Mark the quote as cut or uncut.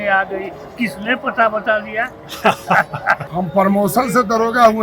cut